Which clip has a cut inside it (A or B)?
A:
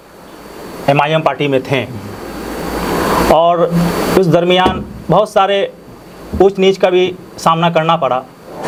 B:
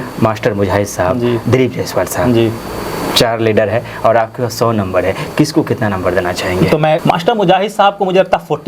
B